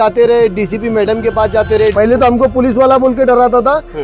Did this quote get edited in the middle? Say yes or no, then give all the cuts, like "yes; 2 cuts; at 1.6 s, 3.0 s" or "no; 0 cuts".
yes; 1 cut; at 1.9 s